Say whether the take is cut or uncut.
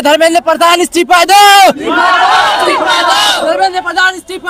uncut